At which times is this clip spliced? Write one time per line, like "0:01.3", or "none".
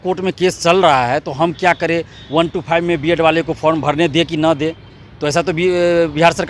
none